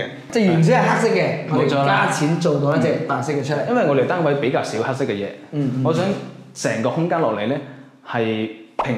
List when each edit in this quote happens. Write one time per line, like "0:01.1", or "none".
none